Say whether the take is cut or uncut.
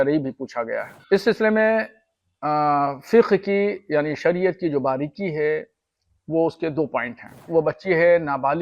cut